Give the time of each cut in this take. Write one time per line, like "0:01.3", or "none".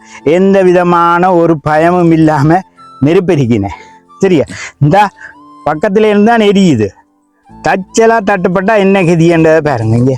none